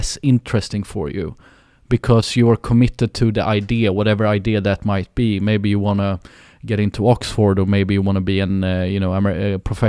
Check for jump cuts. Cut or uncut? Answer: uncut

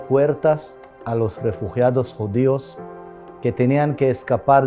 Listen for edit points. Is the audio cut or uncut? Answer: uncut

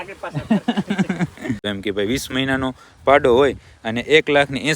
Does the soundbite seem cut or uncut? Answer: cut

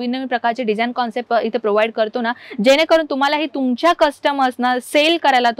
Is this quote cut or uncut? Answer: uncut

